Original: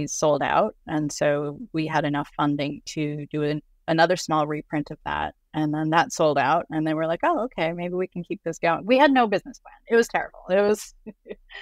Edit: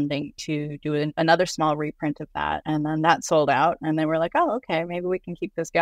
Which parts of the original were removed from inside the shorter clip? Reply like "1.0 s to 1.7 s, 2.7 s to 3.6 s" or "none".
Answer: 3.6 s to 3.8 s, 5.3 s to 5.5 s